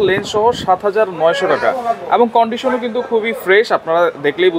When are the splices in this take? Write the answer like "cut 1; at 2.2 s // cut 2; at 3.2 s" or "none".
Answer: none